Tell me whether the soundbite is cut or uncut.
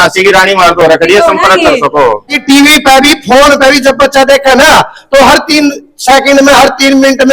cut